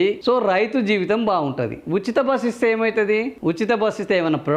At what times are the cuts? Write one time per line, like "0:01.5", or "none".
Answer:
none